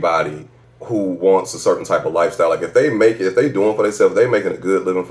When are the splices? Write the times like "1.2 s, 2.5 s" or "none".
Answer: none

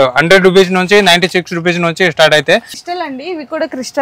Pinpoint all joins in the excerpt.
2.7 s

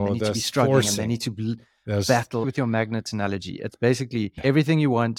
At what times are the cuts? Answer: 2.5 s, 4.4 s

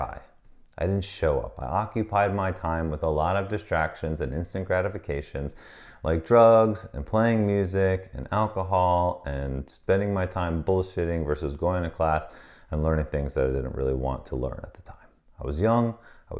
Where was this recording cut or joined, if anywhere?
none

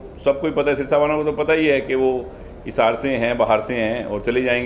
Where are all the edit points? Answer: none

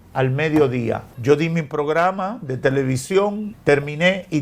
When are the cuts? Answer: 1.1 s, 3.5 s

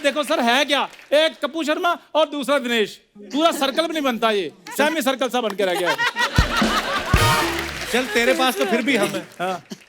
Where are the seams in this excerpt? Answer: 7.8 s

